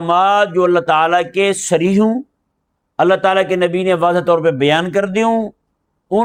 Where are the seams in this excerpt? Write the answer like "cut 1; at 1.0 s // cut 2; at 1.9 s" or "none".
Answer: none